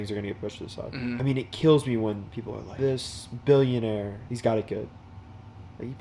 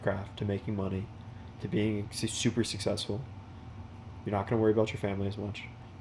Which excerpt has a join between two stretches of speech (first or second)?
first